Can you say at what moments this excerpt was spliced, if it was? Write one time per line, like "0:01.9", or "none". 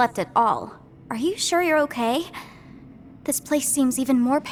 none